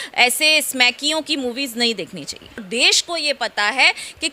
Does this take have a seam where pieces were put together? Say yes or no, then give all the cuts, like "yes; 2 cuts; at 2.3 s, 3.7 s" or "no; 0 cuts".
yes; 1 cut; at 2.6 s